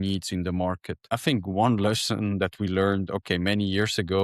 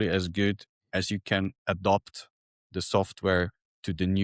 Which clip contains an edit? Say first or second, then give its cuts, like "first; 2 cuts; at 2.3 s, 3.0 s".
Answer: first; 1 cut; at 0.9 s